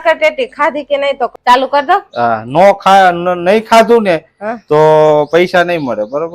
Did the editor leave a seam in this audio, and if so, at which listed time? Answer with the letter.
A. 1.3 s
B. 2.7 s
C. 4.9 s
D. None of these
A